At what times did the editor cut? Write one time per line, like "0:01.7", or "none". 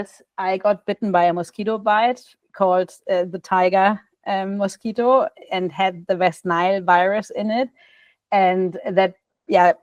none